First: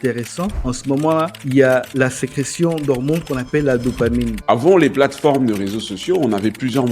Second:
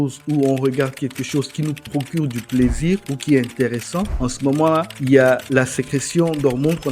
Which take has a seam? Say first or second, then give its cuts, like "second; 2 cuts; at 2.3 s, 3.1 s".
first; 1 cut; at 4.3 s